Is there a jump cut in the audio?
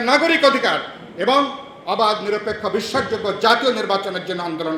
no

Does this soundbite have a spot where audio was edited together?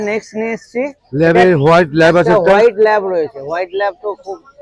no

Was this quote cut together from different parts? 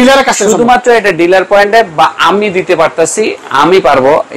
no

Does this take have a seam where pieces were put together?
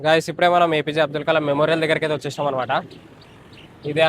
no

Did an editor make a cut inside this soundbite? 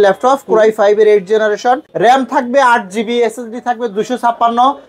yes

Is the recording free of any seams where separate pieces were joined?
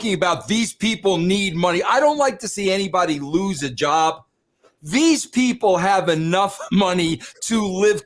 yes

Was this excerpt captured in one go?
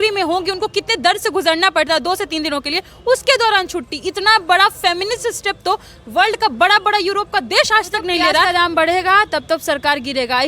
no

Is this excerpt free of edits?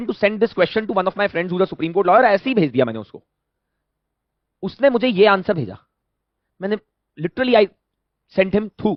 yes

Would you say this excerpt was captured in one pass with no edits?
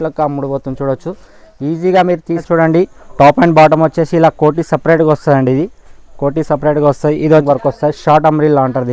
no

